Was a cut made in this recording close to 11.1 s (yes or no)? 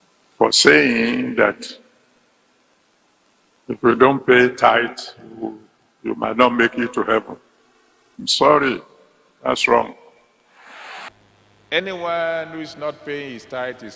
yes